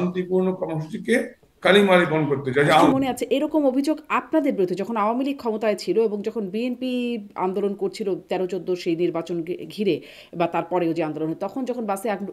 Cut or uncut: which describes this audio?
cut